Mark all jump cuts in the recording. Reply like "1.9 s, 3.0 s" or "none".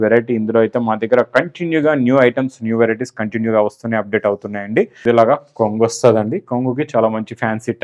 5.0 s